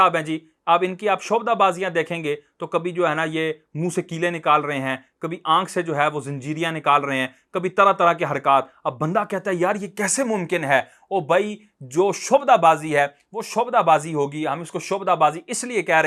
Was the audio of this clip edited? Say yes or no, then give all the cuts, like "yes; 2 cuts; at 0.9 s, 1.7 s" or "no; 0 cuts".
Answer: no; 0 cuts